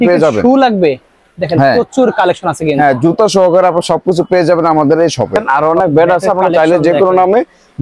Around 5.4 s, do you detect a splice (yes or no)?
yes